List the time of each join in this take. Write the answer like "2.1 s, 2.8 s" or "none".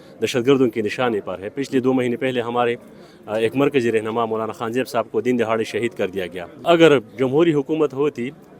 6.4 s